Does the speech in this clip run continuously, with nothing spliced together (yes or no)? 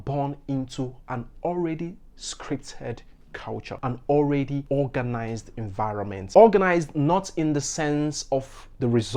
yes